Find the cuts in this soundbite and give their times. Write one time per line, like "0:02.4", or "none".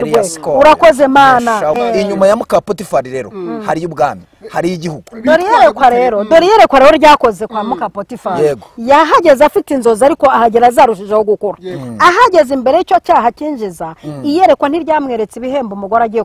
0:01.8